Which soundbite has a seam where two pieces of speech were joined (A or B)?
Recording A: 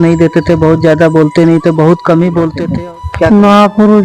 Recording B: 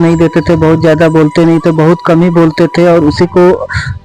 A